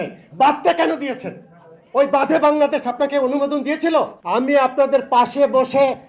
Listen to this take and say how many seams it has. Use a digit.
1